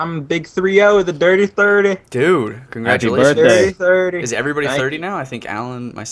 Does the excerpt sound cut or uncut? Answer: cut